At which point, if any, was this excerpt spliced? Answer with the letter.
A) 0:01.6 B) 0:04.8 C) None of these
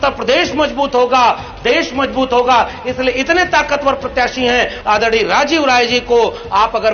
B